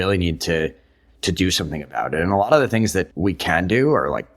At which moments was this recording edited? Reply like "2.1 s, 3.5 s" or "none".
3.1 s